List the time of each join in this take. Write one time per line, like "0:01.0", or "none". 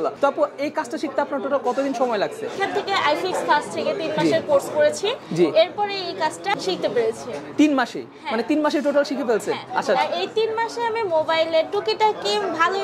0:02.6
0:06.5